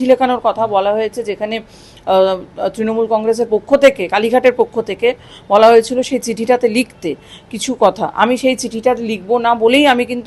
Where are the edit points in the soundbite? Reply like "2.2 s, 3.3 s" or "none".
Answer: none

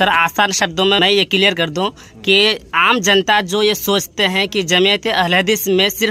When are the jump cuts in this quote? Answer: 1.0 s

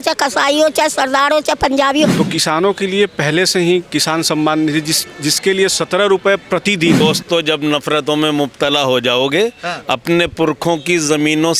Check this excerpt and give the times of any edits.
2.2 s, 7.0 s

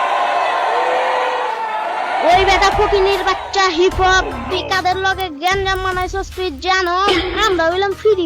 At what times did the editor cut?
1.7 s

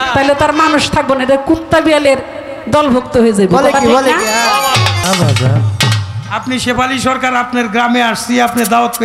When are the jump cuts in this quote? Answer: 5.0 s

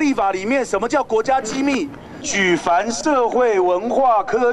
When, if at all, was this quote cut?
2.3 s

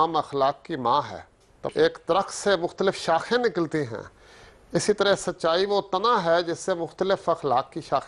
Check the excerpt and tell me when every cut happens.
1.6 s

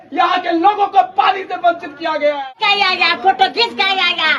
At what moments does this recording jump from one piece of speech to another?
2.5 s

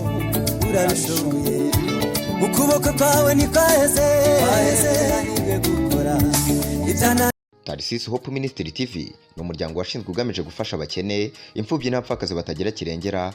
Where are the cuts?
7.3 s

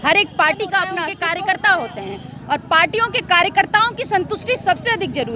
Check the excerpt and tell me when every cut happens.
1.1 s

